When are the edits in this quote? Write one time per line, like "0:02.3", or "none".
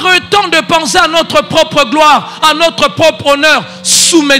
none